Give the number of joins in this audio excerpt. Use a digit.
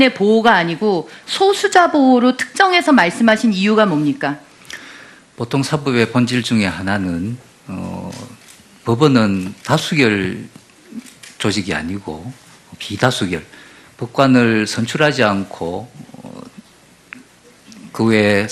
0